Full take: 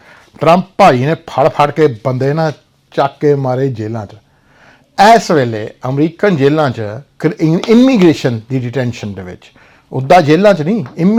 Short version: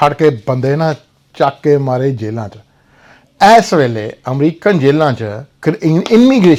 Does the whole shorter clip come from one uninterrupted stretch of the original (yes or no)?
yes